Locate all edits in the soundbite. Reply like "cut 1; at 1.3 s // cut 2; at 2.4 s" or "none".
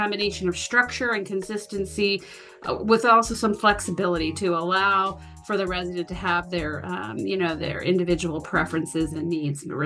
none